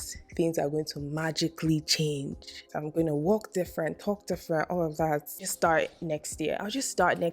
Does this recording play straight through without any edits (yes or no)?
no